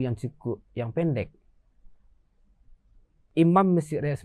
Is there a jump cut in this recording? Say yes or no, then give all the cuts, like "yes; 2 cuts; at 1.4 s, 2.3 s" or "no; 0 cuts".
yes; 1 cut; at 3.3 s